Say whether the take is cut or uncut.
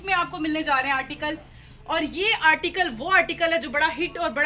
uncut